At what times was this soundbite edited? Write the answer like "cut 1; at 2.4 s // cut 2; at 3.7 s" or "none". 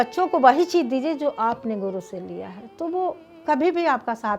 cut 1; at 3.3 s